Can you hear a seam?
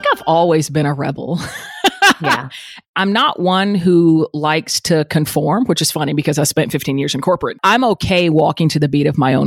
yes; 2 cuts; at 2.8 s, 7.6 s

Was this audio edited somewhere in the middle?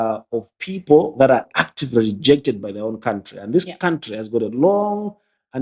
no; 0 cuts

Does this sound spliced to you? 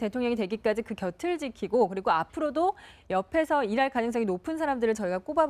no; 0 cuts

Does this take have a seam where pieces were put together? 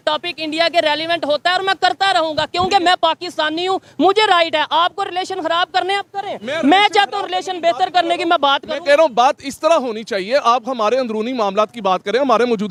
no; 0 cuts

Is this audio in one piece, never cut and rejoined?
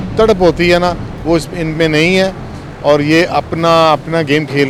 yes; 0 cuts

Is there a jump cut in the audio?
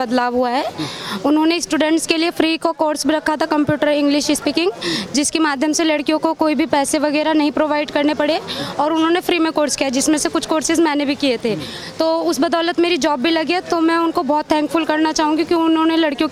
no; 0 cuts

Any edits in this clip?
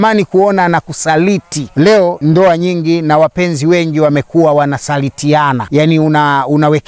yes; 2 cuts; at 2.0 s, 5.6 s

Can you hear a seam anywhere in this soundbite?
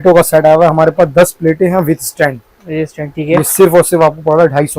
no; 0 cuts

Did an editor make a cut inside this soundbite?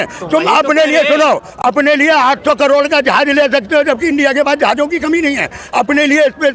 no; 0 cuts

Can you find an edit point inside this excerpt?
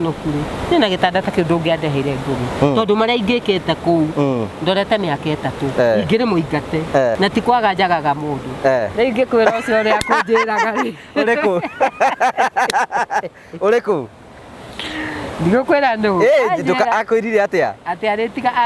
yes; 1 cut; at 7.2 s

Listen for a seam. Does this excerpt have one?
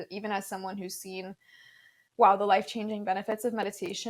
no; 0 cuts

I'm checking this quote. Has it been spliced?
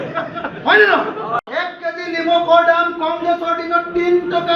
yes; 1 cut; at 1.4 s

